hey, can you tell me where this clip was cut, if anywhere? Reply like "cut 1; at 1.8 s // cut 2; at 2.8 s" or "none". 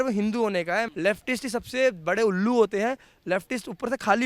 cut 1; at 0.9 s

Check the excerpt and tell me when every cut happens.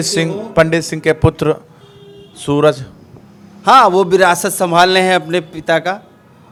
none

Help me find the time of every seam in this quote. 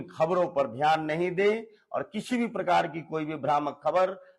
none

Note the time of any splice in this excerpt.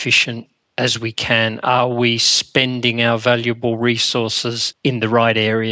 cut 1; at 4.7 s

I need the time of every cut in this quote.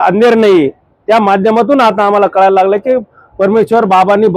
none

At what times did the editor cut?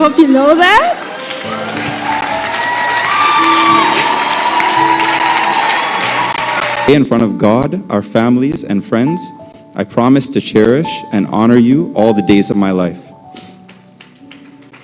cut 1; at 6.9 s

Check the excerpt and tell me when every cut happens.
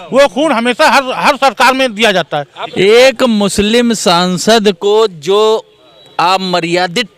cut 1; at 2.6 s

